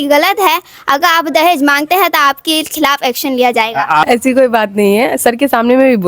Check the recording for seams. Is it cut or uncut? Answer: cut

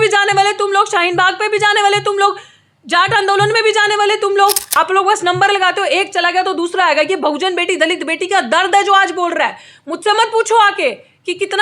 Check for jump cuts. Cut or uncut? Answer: cut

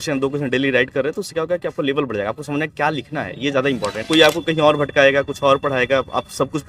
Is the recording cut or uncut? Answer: cut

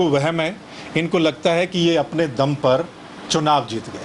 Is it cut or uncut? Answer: uncut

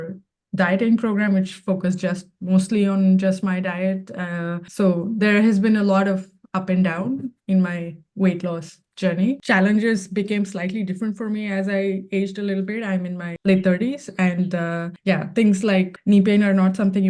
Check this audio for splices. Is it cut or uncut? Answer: cut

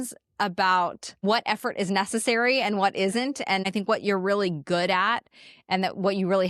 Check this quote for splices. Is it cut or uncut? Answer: cut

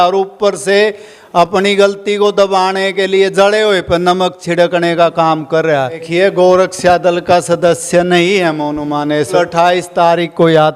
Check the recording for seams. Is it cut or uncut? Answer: cut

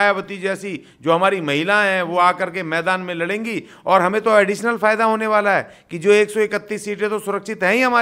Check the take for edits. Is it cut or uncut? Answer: uncut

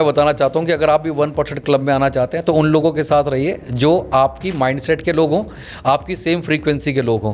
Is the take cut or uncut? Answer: uncut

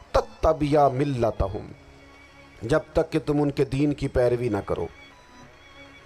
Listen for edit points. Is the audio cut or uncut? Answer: uncut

